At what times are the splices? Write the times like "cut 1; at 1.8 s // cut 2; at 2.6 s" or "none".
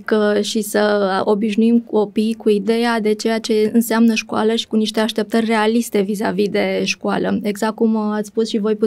none